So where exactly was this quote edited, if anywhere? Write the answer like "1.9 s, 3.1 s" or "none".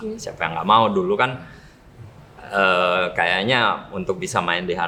none